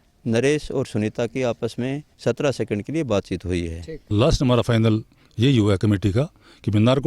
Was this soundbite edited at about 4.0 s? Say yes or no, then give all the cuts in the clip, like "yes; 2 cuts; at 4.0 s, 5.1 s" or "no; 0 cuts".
yes; 1 cut; at 4.0 s